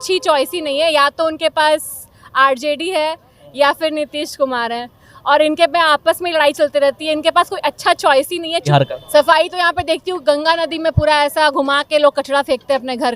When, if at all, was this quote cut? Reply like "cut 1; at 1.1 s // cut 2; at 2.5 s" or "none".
cut 1; at 8.6 s